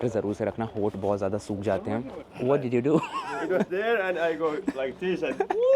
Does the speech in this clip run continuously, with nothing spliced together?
no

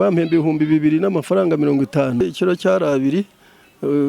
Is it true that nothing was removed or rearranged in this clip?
no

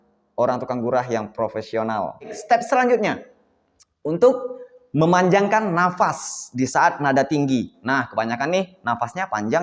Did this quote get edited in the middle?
yes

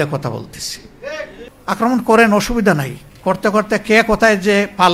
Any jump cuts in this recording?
yes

